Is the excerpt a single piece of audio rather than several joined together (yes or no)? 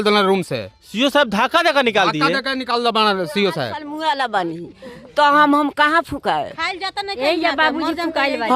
no